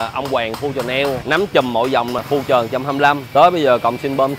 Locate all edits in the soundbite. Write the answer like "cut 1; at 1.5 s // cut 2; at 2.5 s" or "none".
cut 1; at 1.2 s // cut 2; at 2.2 s // cut 3; at 3.2 s